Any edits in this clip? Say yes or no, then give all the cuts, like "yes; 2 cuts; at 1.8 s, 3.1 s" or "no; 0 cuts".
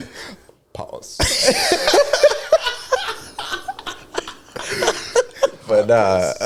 no; 0 cuts